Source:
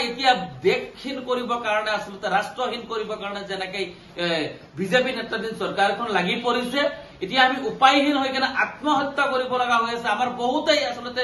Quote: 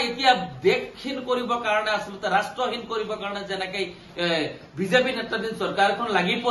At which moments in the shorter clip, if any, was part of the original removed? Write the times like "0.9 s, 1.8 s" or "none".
none